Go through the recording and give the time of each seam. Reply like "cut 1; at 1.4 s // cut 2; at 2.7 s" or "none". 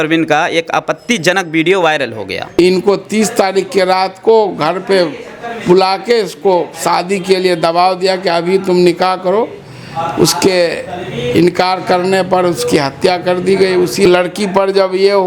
cut 1; at 2.6 s // cut 2; at 14.1 s